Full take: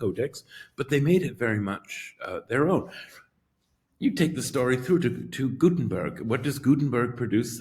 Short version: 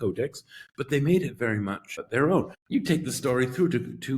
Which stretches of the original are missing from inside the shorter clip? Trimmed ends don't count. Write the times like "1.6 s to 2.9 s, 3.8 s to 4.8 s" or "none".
1.9 s to 2.3 s, 3.0 s to 3.9 s